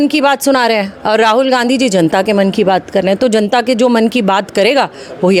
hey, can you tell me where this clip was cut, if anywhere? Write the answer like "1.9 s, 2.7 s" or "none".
none

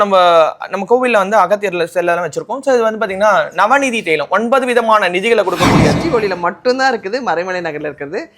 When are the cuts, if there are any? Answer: 5.9 s

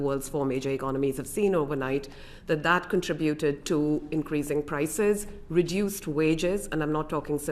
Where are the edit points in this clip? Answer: none

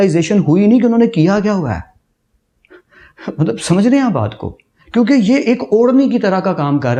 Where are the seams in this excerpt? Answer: none

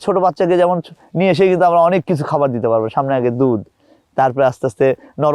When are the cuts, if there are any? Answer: none

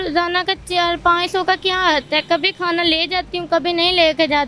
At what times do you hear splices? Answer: none

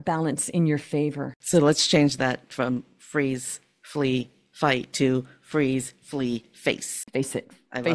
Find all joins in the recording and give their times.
1.3 s, 6.9 s

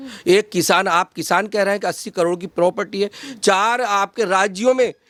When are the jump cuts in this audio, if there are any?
none

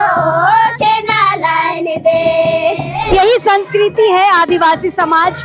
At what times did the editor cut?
3.1 s

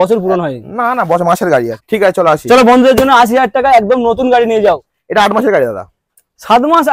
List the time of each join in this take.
1.7 s, 4.9 s

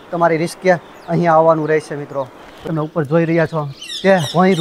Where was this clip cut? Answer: 2.7 s

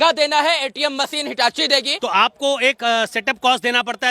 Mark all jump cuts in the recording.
1.9 s

